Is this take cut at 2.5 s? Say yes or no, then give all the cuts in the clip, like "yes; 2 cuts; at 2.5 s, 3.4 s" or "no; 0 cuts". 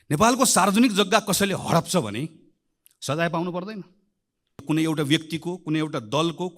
no; 1 cut; at 4.6 s